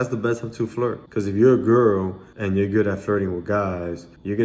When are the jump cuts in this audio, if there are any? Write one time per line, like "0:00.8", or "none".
0:01.0